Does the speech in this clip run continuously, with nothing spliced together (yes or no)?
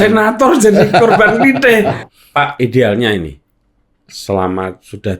no